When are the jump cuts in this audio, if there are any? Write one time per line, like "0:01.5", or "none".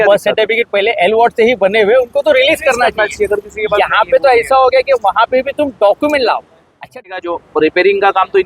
0:07.0